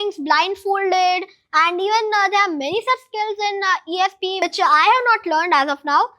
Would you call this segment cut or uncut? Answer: cut